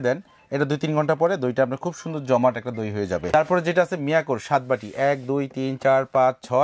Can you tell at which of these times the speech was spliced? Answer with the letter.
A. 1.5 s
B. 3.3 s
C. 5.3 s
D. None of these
B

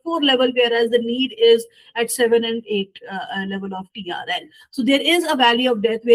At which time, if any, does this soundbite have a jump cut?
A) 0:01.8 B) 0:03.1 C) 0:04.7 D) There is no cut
D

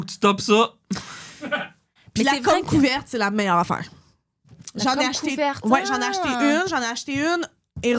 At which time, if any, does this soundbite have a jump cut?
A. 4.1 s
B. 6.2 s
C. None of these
C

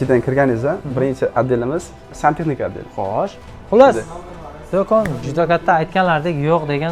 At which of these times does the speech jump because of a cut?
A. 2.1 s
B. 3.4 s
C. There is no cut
B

